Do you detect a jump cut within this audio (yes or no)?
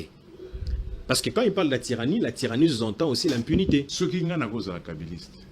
yes